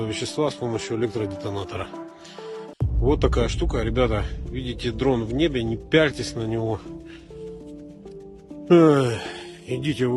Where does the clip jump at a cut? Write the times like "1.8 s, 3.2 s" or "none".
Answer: none